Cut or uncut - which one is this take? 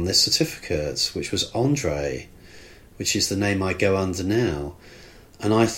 uncut